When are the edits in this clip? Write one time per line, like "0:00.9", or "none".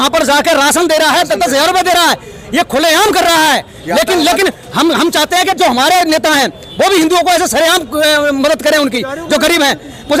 none